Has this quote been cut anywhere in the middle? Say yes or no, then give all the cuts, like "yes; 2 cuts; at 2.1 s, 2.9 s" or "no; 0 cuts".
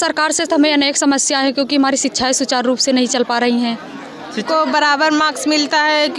yes; 1 cut; at 4.5 s